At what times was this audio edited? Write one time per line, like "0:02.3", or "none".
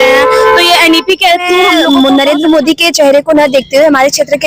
0:01.8

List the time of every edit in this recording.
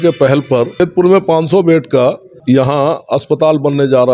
0:00.8
0:02.3

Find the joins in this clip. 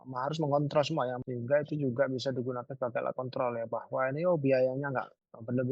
0:01.2

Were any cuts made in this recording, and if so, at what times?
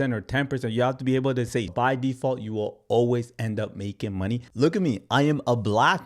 0:01.7
0:04.5

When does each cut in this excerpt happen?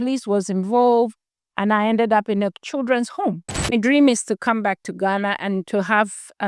0:03.5

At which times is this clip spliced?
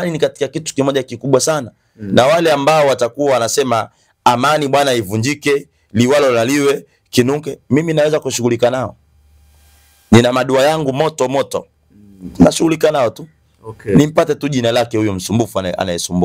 none

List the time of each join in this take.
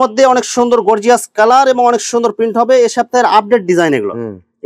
none

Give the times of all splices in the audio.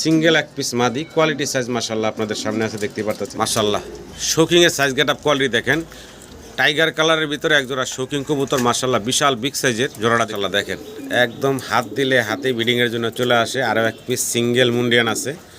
0:03.3
0:10.3

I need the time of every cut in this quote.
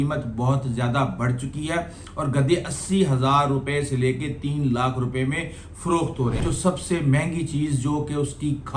0:06.4

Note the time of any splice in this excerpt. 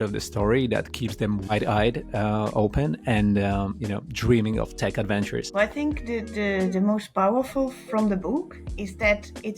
0:01.5
0:05.5

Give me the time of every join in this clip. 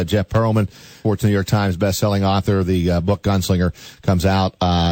0:01.0

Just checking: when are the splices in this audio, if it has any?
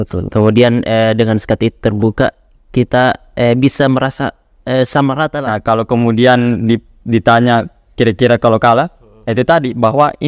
0:05.5

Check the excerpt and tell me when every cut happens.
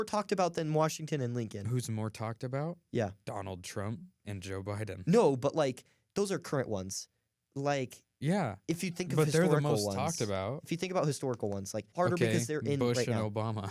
0:11.9

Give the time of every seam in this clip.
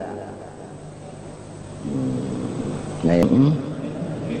0:03.2

